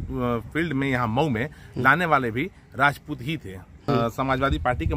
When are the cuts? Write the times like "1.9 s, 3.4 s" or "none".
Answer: 3.9 s